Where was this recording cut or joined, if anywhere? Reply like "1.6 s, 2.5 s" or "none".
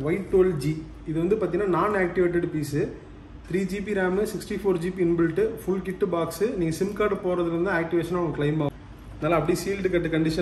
8.7 s